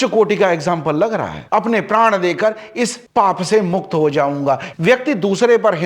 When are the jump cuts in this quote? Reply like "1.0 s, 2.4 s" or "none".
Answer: 1.4 s, 4.7 s